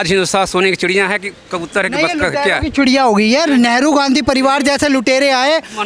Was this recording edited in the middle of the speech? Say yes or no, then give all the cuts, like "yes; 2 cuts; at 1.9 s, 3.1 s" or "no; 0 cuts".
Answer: no; 0 cuts